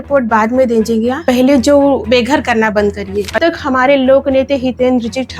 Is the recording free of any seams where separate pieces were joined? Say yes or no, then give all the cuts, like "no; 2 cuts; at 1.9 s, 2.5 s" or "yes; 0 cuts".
no; 2 cuts; at 2.0 s, 3.4 s